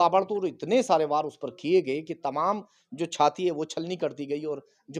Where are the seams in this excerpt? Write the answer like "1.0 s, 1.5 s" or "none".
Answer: none